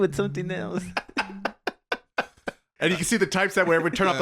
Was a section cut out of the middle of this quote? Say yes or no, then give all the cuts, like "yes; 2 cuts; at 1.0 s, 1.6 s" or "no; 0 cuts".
yes; 1 cut; at 2.7 s